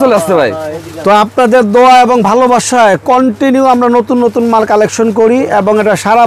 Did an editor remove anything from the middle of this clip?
no; 0 cuts

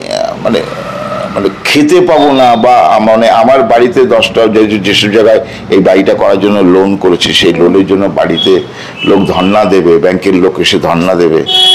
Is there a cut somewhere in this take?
no; 0 cuts

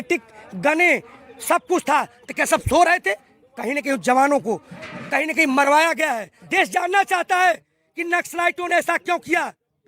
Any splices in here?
yes; 1 cut; at 6.4 s

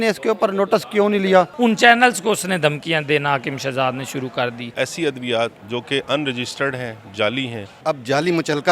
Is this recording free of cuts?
no; 3 cuts; at 1.5 s, 4.7 s, 7.8 s

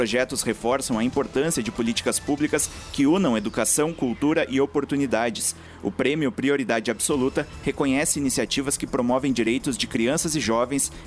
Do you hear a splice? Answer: no; 0 cuts

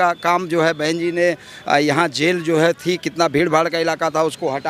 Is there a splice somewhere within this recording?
no; 0 cuts

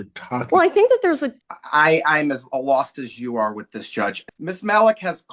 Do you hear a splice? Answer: yes; 2 cuts; at 1.3 s, 4.2 s

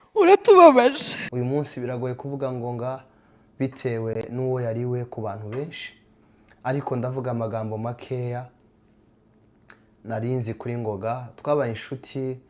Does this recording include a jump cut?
yes; 1 cut; at 1.2 s

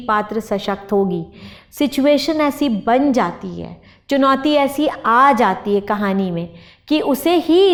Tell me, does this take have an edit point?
no; 0 cuts

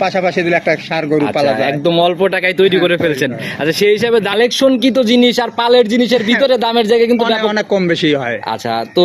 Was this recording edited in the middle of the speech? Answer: yes; 1 cut; at 4.3 s

